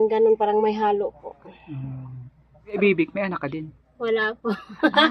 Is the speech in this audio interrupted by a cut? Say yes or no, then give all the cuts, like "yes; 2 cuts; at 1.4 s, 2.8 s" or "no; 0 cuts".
yes; 1 cut; at 2.8 s